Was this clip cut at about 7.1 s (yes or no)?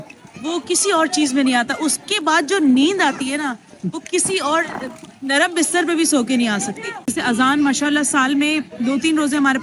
yes